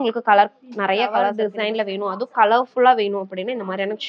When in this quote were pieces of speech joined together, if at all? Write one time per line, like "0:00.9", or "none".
0:01.4